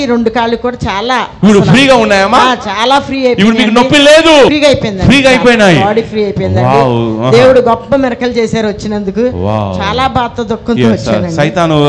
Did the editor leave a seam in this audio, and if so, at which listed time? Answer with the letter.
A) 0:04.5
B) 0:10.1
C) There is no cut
A